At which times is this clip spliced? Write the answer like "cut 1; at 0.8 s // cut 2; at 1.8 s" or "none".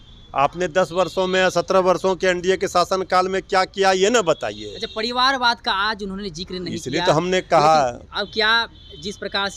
none